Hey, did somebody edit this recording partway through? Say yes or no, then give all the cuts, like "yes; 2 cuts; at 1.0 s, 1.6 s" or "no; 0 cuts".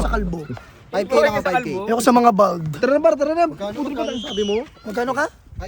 no; 0 cuts